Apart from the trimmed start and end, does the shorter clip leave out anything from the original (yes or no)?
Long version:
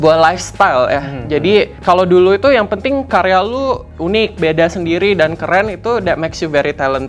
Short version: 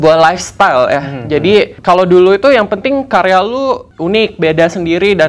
no